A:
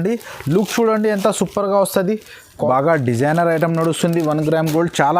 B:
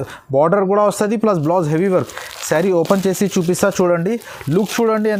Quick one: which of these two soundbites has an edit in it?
A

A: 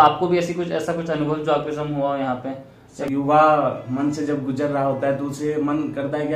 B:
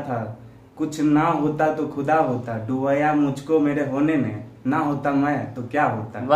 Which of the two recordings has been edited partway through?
A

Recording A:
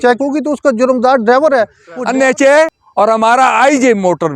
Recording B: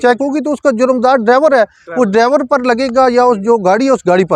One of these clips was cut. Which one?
A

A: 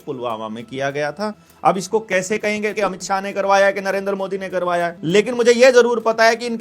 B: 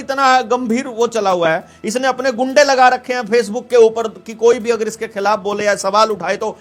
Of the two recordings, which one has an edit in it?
A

